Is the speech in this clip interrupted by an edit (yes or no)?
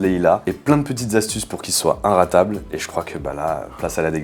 no